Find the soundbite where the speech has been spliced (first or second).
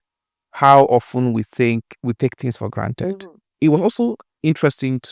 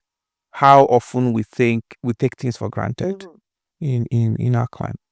first